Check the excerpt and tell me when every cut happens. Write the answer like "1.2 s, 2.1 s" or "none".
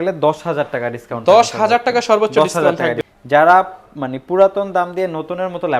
3.0 s